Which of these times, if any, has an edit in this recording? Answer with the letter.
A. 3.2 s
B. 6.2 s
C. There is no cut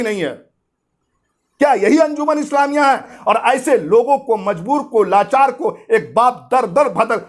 A